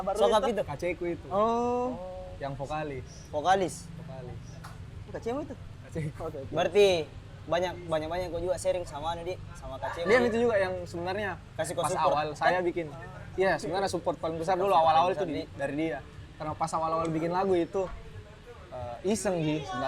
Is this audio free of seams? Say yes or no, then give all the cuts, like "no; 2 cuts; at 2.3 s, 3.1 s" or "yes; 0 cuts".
yes; 0 cuts